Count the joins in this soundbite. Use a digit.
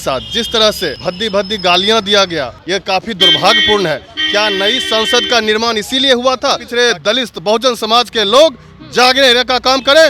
3